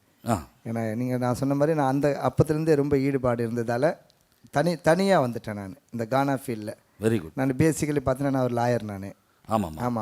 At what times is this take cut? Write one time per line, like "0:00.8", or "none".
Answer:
none